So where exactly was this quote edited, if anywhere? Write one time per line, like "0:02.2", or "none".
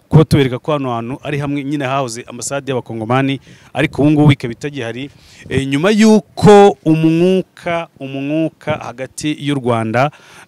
none

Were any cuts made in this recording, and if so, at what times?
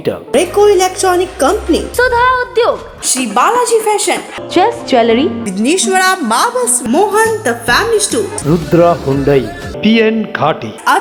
none

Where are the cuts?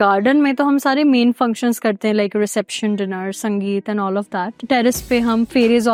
none

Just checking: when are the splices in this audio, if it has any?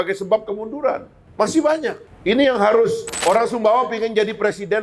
0:01.2
0:02.1
0:03.1

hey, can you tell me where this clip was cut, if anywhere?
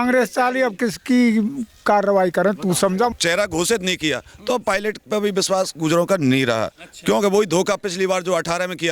0:03.1

